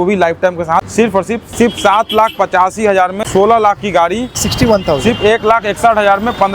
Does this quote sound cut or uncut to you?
cut